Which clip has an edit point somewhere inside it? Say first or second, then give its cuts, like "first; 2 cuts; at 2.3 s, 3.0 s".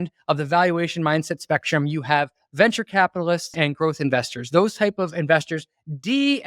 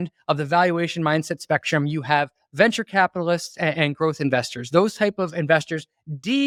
first; 1 cut; at 3.5 s